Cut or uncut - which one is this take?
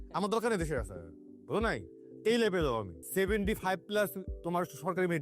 cut